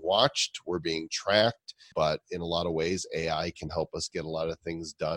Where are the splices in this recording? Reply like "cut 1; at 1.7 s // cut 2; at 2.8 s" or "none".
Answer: cut 1; at 1.8 s